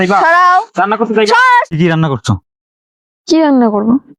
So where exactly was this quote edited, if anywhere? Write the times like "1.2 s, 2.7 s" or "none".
1.7 s